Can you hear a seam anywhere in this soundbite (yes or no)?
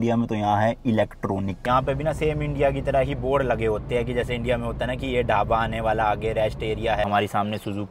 yes